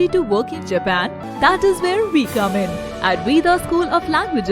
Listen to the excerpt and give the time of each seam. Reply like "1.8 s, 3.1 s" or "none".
1.2 s